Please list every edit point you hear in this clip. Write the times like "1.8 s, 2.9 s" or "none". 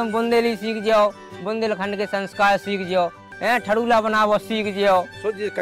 3.2 s